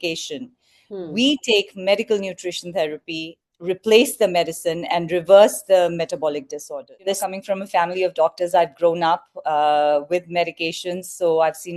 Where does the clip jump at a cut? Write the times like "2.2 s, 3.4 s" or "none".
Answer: 7.1 s